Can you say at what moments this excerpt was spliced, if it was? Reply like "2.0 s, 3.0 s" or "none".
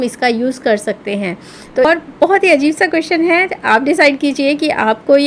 1.9 s